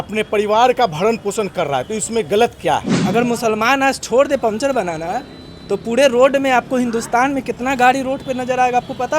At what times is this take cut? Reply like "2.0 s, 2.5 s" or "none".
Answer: 2.9 s